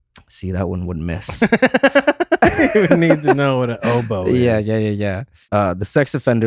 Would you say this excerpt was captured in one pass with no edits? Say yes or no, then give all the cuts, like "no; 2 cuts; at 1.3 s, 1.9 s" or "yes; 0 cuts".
no; 1 cut; at 5.5 s